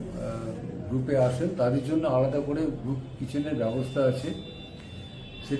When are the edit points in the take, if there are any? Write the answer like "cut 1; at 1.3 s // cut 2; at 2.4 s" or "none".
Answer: none

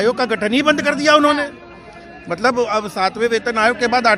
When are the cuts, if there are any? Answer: none

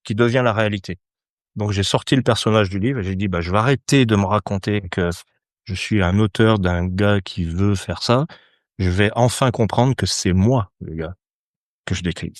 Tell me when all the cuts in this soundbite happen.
none

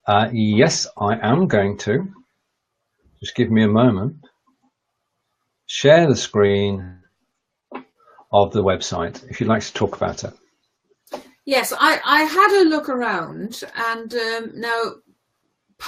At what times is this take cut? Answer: none

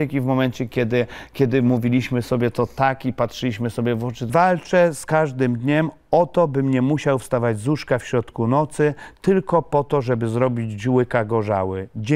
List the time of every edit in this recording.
cut 1; at 4.3 s

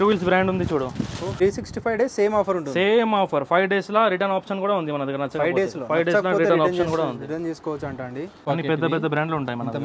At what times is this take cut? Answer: cut 1; at 1.3 s // cut 2; at 8.4 s

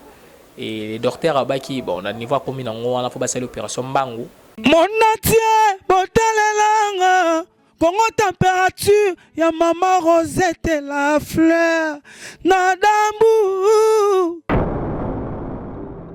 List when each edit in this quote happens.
cut 1; at 4.5 s

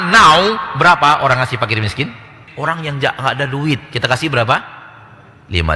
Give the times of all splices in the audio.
cut 1; at 2.5 s

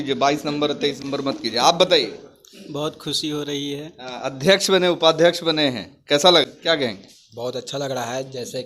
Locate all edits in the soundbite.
cut 1; at 1.0 s // cut 2; at 6.4 s

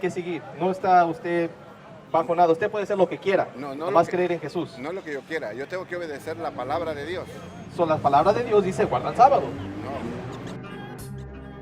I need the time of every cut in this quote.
cut 1; at 10.3 s

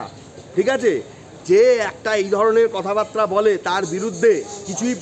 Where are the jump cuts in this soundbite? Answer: none

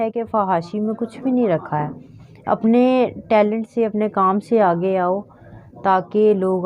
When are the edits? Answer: none

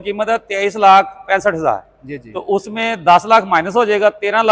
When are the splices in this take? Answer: none

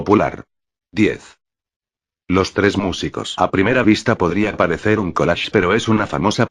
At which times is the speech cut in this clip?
cut 1; at 5.5 s

